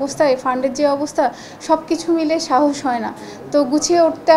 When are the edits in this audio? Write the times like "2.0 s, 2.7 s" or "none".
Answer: none